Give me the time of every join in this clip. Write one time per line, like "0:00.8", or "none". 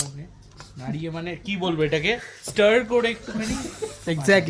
none